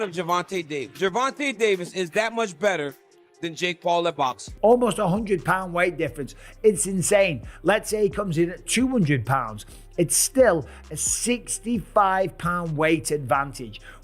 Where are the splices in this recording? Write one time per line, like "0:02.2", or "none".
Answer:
0:04.5